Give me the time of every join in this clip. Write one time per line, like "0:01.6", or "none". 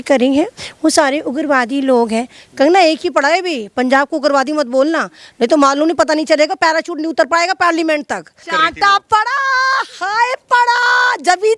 0:08.5